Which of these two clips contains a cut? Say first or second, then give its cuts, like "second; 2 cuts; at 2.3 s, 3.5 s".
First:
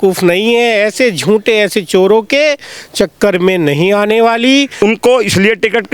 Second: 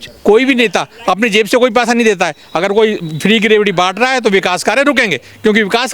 first; 1 cut; at 4.8 s